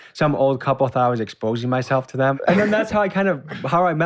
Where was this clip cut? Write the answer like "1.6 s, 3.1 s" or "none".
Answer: 2.4 s